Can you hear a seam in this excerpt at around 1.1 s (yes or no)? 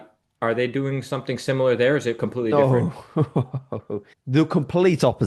no